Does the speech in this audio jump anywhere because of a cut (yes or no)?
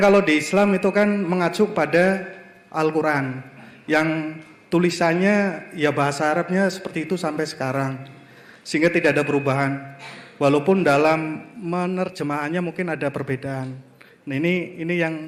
no